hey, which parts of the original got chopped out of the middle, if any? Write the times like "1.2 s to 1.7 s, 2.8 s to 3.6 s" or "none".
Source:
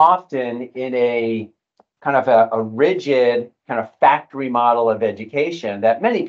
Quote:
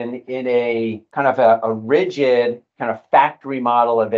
1.5 s to 1.9 s